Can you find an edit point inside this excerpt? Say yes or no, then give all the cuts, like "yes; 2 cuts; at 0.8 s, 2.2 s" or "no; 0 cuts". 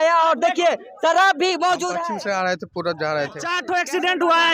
yes; 2 cuts; at 1.9 s, 3.5 s